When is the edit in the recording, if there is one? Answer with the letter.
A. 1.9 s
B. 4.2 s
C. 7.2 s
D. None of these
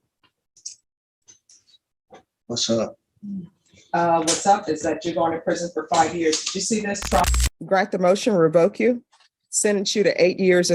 C